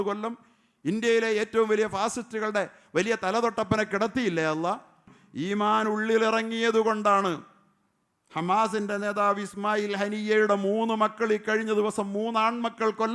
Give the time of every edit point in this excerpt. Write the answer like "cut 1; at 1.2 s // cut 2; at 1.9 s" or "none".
cut 1; at 5.1 s